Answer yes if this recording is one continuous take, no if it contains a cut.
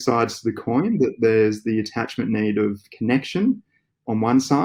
yes